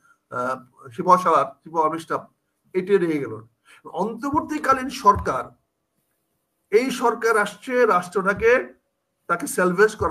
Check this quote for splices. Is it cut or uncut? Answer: uncut